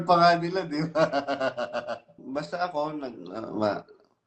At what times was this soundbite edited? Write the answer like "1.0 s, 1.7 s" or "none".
2.2 s